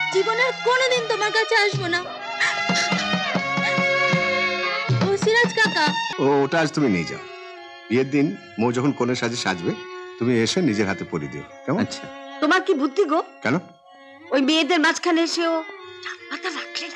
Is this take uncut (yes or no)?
no